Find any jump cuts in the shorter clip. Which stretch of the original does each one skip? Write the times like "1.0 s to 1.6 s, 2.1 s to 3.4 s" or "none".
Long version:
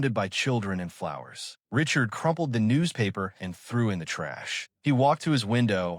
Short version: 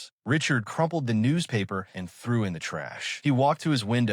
4.5 s to 4.6 s